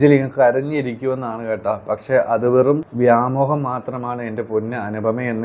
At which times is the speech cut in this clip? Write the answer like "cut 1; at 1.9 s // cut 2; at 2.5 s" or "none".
cut 1; at 2.9 s